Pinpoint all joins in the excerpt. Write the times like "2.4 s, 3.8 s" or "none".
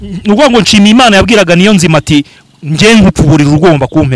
none